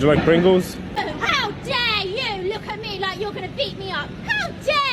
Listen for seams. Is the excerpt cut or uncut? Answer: cut